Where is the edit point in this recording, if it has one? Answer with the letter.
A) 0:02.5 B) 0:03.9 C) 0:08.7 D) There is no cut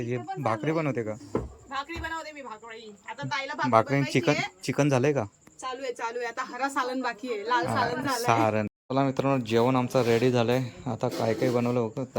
C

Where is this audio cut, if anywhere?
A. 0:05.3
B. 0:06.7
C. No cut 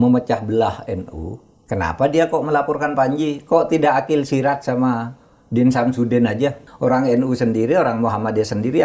B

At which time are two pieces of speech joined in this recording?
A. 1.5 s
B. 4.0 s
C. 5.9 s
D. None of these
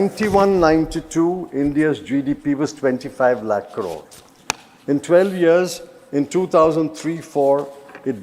D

